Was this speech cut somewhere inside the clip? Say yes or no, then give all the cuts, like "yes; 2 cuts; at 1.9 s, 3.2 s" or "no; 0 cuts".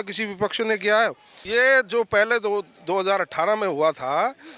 yes; 1 cut; at 1.4 s